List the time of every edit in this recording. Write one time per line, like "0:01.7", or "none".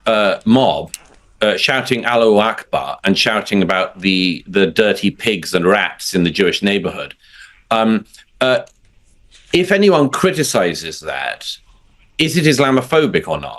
none